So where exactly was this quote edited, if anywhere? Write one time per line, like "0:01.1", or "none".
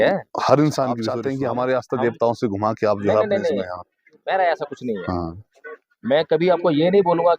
0:01.2